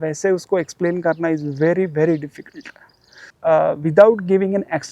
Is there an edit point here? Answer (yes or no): yes